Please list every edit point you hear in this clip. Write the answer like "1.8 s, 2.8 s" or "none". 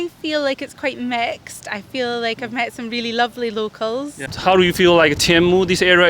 4.2 s